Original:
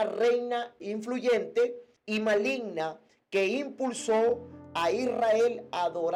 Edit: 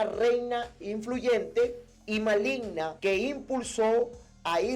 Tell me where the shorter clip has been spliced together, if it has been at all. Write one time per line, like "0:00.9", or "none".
0:02.9